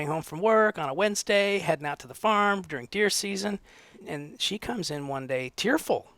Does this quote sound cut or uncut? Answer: cut